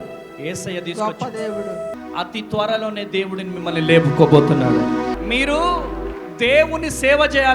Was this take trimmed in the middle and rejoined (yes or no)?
yes